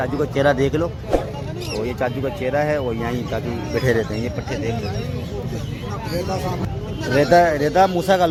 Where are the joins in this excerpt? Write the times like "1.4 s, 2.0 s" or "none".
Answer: none